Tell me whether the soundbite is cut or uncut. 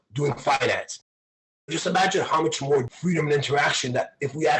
cut